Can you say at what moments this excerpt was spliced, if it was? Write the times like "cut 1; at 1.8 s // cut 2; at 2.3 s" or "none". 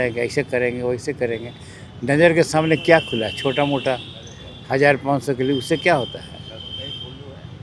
none